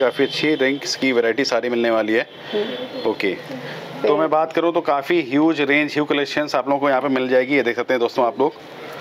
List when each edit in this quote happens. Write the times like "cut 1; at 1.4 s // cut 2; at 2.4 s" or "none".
none